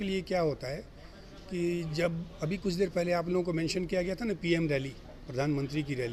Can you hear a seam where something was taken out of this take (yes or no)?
no